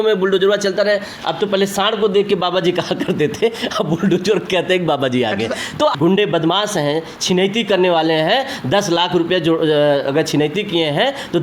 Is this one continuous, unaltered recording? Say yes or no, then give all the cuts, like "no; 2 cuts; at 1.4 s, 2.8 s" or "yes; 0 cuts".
no; 1 cut; at 6.0 s